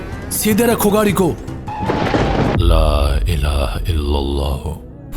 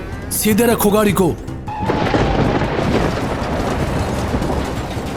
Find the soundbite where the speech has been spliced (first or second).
first